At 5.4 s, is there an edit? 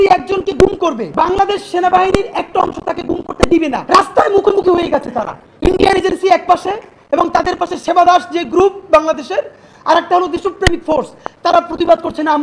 no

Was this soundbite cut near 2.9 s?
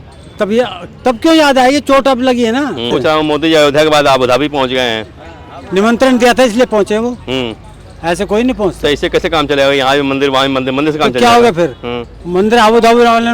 yes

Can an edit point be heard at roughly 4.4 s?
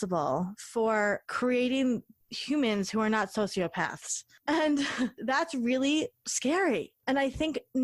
no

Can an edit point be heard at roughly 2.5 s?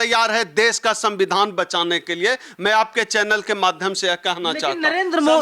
no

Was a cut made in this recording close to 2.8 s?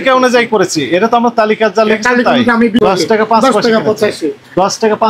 yes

